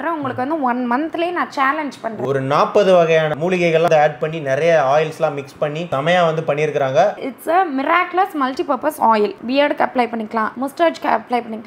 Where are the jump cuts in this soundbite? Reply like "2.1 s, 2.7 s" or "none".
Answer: 2.2 s, 3.9 s, 7.2 s, 9.4 s

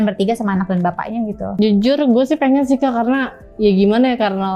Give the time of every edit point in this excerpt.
1.6 s

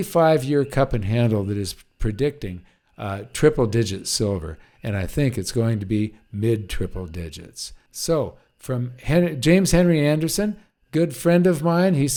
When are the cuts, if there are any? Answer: none

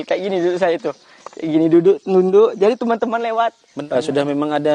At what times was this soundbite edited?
3.7 s

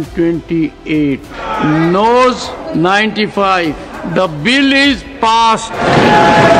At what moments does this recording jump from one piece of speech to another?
1.5 s, 2.5 s, 4.0 s, 5.8 s

